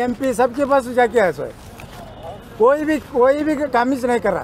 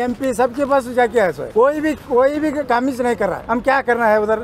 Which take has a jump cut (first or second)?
second